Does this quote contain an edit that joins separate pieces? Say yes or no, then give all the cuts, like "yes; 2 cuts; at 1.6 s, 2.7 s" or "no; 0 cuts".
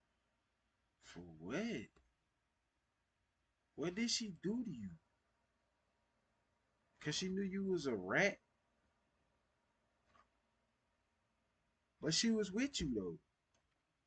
no; 0 cuts